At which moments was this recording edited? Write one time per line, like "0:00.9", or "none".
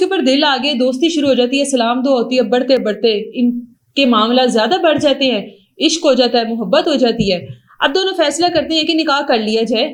none